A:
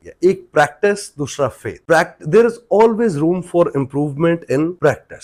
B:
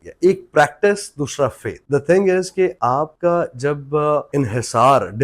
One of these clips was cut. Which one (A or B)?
B